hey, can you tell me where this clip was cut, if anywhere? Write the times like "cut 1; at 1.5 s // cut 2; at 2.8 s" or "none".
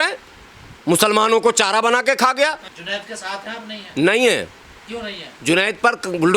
cut 1; at 2.7 s

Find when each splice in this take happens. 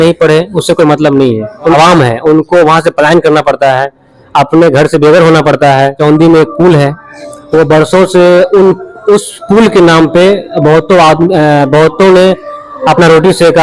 cut 1; at 1.7 s // cut 2; at 6.0 s

